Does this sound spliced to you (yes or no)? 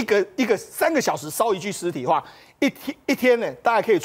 no